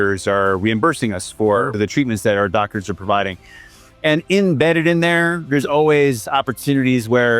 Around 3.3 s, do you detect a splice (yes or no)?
no